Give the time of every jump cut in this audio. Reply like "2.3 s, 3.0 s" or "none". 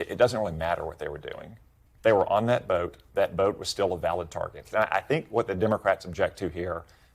4.7 s